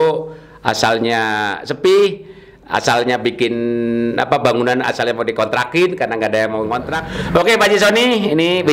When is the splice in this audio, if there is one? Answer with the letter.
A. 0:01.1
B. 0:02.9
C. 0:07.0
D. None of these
C